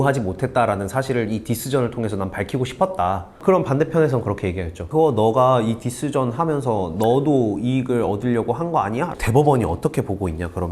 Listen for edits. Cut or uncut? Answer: cut